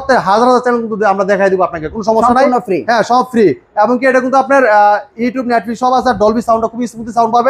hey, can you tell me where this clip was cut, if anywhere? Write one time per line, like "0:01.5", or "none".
none